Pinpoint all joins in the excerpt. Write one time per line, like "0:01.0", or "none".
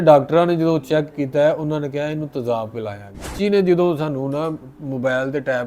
0:03.3